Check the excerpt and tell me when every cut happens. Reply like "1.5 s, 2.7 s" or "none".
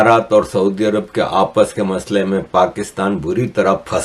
none